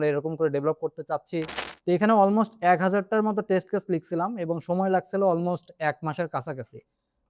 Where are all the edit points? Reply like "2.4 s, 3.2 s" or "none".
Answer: 1.6 s